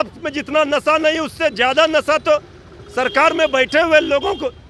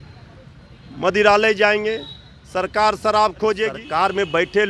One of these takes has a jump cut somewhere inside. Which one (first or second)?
second